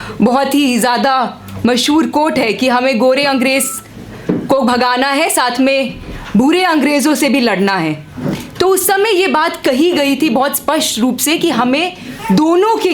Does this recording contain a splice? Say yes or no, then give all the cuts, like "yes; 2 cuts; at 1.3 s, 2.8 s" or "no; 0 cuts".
no; 0 cuts